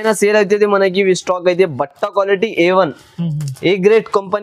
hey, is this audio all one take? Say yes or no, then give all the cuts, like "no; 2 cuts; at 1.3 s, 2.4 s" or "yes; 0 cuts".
yes; 0 cuts